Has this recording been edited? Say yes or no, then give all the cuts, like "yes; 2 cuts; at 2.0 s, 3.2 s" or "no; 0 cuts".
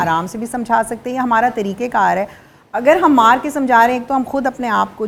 no; 0 cuts